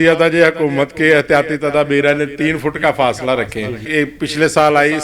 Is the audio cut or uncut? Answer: cut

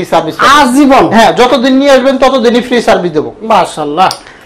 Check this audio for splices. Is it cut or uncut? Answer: uncut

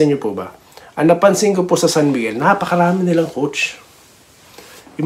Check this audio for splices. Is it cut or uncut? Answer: uncut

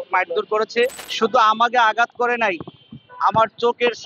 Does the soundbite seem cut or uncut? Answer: cut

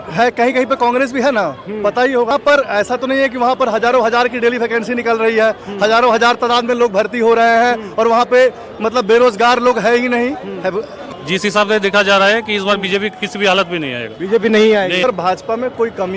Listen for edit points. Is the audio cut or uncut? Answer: cut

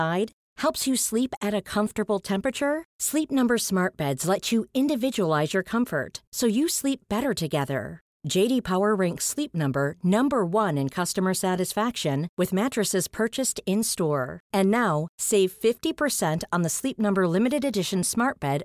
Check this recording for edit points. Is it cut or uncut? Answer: uncut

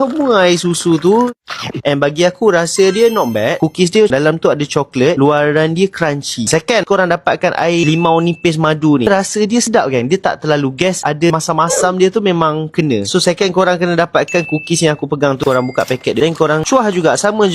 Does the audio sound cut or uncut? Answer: uncut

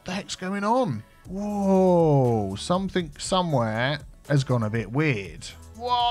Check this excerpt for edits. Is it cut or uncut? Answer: uncut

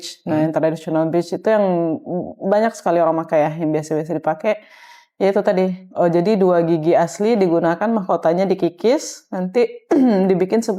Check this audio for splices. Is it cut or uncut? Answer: uncut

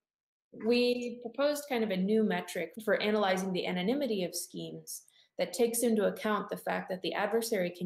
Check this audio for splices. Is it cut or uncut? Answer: cut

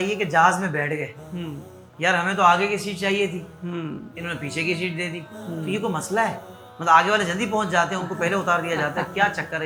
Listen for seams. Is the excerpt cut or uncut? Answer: uncut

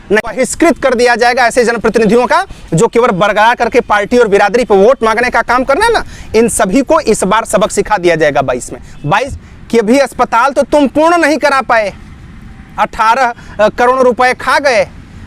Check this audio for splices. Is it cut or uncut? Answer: cut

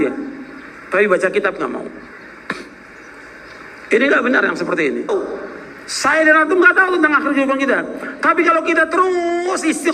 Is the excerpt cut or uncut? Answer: cut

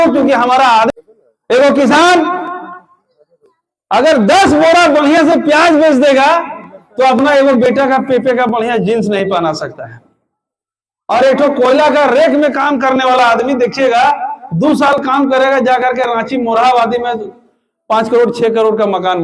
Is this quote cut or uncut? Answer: cut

